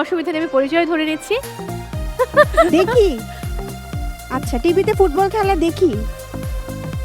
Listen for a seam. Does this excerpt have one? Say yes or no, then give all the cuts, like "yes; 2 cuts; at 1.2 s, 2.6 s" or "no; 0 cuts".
yes; 1 cut; at 1.5 s